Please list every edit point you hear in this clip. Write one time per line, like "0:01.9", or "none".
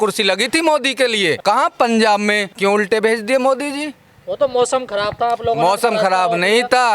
0:01.4
0:02.5